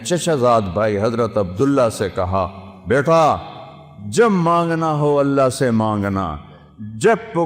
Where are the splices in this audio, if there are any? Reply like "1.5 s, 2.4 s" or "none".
none